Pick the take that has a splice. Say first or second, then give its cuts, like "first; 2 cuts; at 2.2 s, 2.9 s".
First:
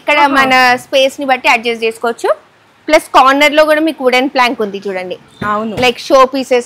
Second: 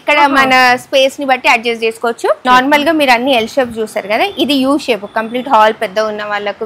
second; 1 cut; at 2.4 s